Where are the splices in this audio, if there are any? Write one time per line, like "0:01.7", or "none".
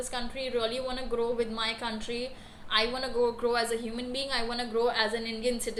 none

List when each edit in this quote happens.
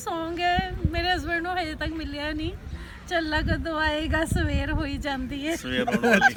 none

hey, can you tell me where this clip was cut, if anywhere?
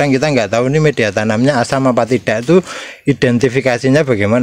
none

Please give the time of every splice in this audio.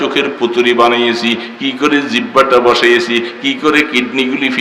none

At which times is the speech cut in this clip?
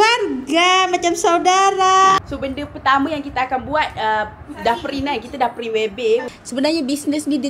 0:02.2
0:06.2

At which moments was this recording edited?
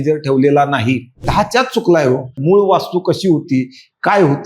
0:01.3
0:02.4

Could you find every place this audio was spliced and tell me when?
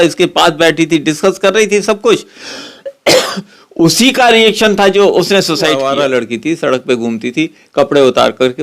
0:05.8

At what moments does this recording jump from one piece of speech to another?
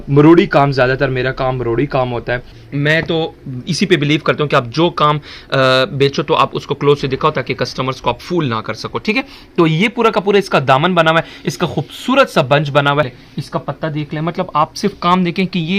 0:02.6
0:13.2

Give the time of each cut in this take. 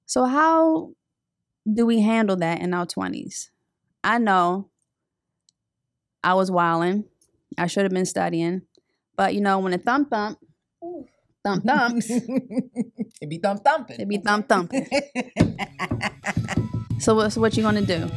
none

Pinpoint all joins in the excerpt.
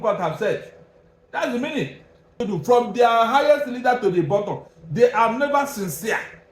0:02.4

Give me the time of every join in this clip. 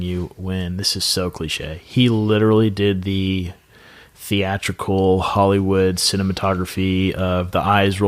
none

